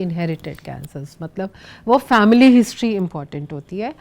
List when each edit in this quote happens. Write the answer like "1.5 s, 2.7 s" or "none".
none